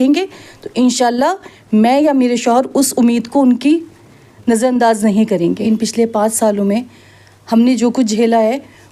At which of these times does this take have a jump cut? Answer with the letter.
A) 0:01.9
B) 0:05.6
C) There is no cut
B